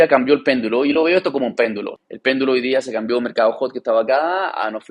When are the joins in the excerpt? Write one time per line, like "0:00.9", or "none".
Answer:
0:01.9

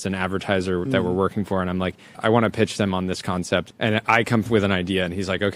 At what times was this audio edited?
0:02.2
0:03.7

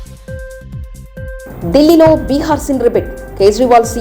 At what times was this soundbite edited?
0:01.4

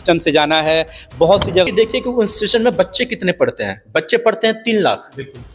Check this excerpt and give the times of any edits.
0:01.7

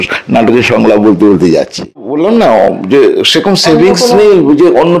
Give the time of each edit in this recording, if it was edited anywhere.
0:02.1

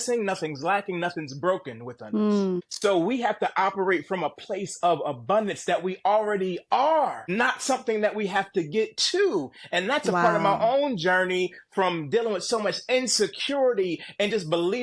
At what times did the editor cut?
0:02.5
0:07.2

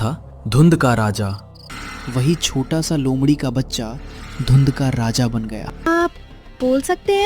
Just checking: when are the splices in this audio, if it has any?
0:01.7
0:05.9

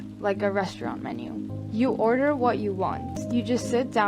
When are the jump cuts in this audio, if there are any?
0:01.5
0:03.1

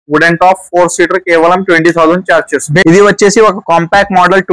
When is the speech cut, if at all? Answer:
0:02.8

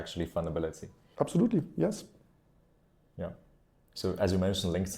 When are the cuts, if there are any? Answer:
none

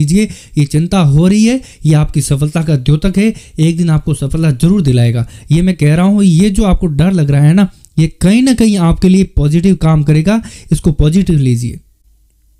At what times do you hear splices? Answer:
none

